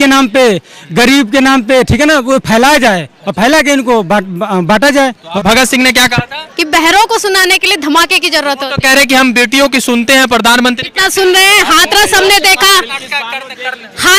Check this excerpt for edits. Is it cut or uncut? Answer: cut